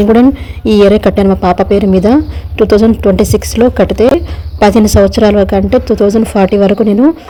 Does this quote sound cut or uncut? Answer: uncut